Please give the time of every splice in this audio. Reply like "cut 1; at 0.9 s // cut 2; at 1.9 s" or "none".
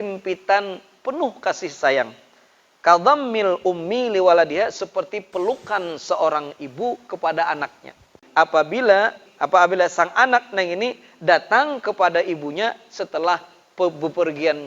cut 1; at 8.2 s // cut 2; at 9.3 s